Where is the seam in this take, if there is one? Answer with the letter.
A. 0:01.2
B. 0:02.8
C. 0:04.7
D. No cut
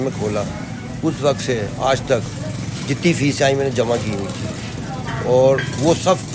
D